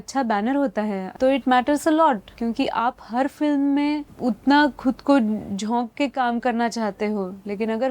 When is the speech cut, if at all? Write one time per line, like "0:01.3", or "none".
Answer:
0:01.0
0:02.3
0:04.1